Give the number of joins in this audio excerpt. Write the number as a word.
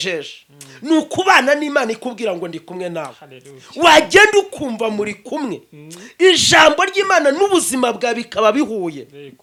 zero